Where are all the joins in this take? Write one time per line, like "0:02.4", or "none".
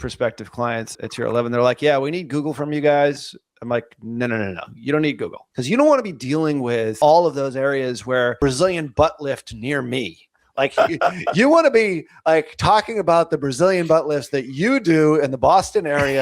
0:00.9
0:05.5
0:07.0
0:08.4